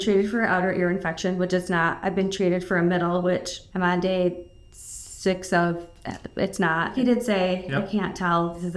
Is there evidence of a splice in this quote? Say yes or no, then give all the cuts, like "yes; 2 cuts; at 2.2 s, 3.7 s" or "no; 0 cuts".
yes; 2 cuts; at 3.6 s, 6.9 s